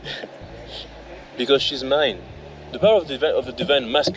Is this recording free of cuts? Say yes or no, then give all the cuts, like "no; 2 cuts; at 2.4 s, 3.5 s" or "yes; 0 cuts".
no; 1 cut; at 2.7 s